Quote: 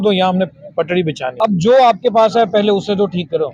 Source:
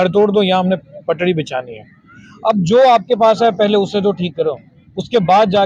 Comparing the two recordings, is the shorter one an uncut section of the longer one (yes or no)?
no